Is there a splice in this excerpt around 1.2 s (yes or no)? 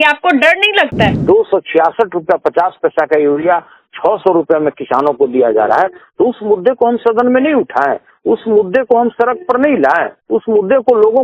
yes